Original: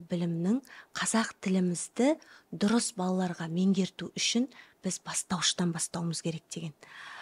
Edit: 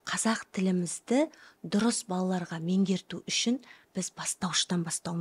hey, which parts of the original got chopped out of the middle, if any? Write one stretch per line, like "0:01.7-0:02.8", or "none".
none